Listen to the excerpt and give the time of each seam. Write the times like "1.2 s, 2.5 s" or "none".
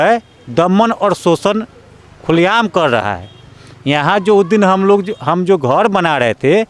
none